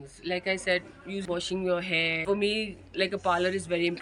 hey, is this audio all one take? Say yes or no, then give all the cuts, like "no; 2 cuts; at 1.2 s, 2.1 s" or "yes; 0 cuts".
no; 2 cuts; at 1.2 s, 2.2 s